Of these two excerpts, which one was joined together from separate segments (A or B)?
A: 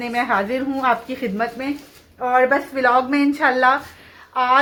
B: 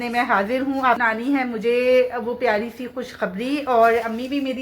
B